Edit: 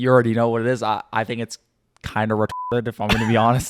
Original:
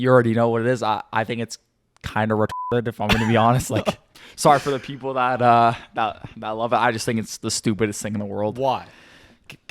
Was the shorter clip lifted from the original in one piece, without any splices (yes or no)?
yes